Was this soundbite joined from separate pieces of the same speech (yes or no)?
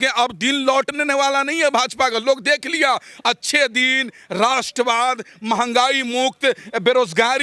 no